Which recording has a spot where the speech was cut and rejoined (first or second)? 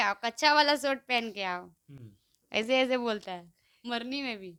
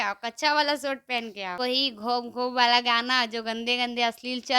second